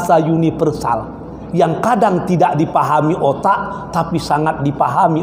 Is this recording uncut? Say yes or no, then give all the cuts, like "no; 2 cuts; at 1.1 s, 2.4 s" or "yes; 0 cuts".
yes; 0 cuts